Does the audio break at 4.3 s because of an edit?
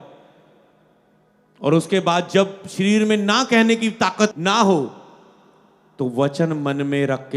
yes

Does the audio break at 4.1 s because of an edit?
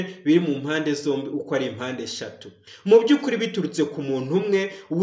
no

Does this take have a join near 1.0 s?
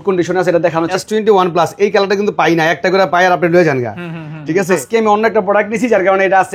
yes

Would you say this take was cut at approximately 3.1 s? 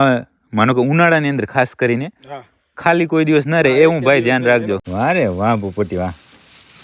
no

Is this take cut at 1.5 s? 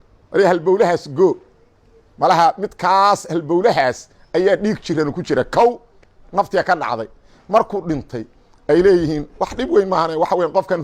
no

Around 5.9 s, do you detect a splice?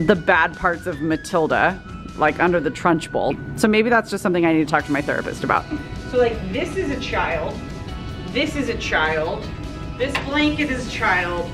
yes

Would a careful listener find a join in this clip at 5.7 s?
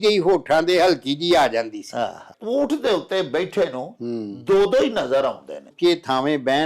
yes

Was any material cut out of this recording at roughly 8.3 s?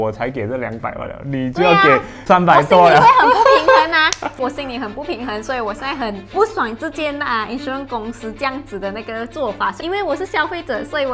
no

